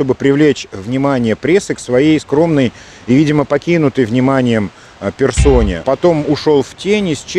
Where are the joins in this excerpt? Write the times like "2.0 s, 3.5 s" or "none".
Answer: 5.8 s